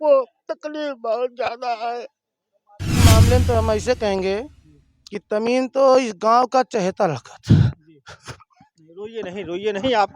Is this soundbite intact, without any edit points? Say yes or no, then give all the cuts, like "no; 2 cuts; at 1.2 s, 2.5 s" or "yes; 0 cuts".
no; 1 cut; at 3.0 s